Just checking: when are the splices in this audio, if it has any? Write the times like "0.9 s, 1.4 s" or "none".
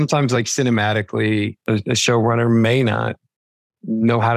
1.6 s